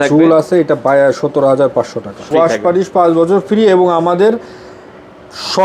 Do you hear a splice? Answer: yes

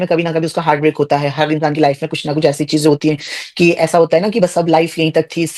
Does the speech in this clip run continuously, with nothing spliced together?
yes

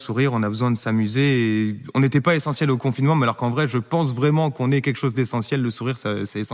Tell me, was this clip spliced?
no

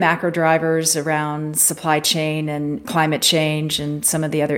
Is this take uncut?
no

